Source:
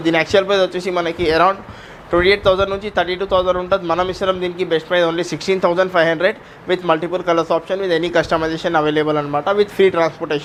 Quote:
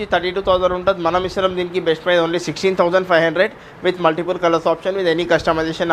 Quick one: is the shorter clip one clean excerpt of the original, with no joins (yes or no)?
yes